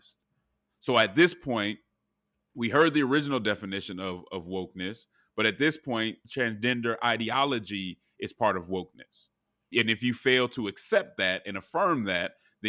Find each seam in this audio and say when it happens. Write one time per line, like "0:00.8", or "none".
0:06.2
0:09.7